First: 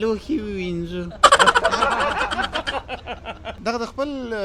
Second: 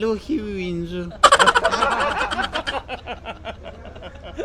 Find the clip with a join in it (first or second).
first